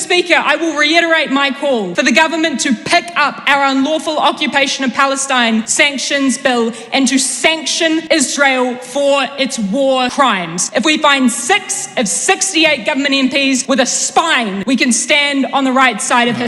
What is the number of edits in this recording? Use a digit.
6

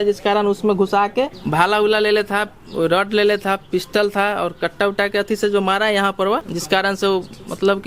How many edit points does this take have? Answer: 2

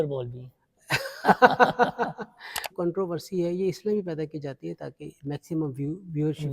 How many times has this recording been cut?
1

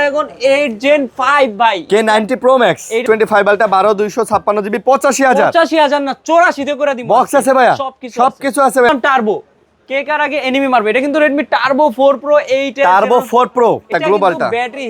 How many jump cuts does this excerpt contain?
3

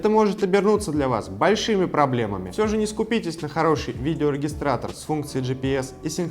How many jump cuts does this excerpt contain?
1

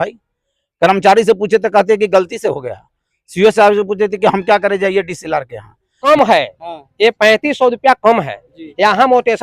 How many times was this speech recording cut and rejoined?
1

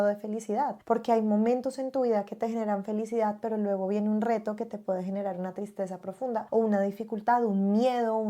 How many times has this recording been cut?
0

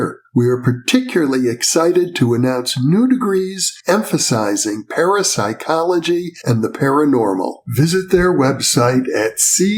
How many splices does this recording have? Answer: 0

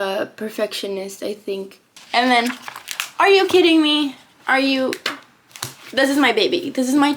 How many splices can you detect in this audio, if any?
1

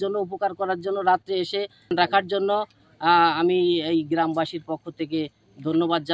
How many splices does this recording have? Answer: 1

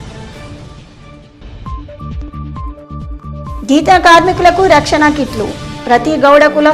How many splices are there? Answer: 1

